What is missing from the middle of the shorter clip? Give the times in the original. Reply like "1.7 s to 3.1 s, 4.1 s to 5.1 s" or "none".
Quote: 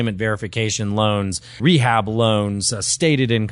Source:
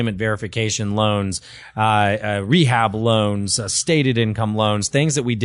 1.6 s to 2.4 s